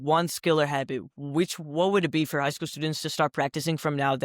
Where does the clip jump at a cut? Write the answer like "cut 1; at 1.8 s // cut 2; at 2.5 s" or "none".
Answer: none

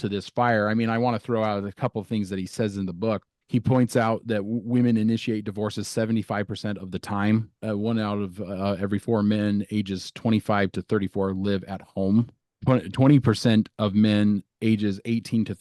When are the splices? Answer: cut 1; at 3.3 s // cut 2; at 7.6 s // cut 3; at 12.4 s

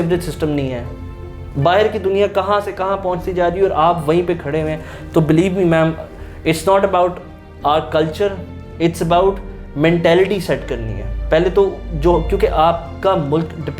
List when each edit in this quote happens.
none

